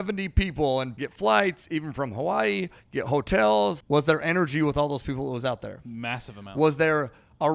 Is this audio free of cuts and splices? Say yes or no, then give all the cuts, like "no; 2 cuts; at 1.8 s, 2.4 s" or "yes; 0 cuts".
no; 2 cuts; at 0.9 s, 3.8 s